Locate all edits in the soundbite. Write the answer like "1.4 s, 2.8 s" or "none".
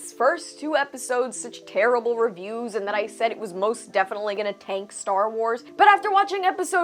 5.7 s